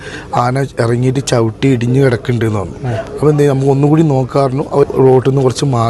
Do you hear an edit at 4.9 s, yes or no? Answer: yes